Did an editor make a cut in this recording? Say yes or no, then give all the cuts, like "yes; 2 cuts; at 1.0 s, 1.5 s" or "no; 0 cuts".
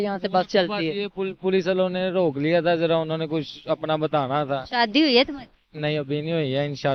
no; 0 cuts